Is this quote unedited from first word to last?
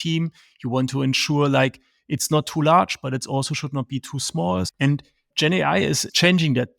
no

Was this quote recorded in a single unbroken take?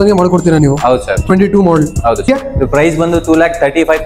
no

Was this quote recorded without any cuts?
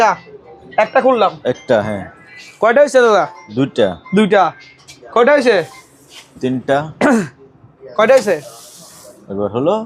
yes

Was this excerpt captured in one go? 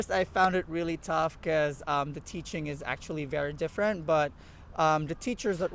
yes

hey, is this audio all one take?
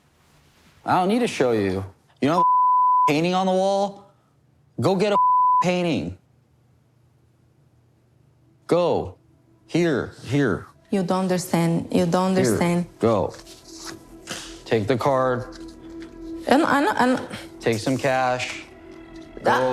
yes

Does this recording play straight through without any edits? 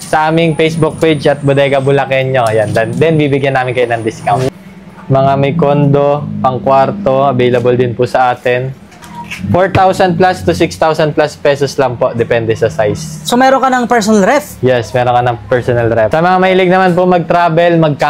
no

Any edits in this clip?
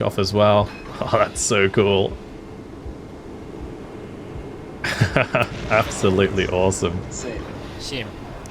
yes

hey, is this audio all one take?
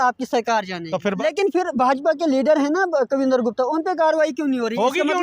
no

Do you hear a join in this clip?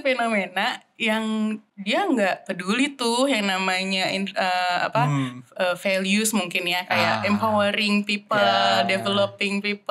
yes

